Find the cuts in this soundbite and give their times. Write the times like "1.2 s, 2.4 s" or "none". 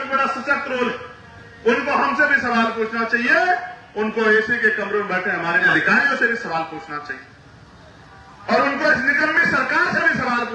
5.7 s